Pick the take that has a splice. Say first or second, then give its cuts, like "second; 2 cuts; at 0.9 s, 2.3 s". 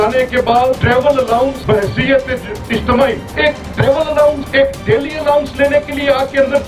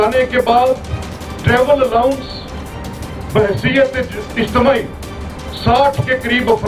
first; 4 cuts; at 0.8 s, 1.6 s, 3.3 s, 4.4 s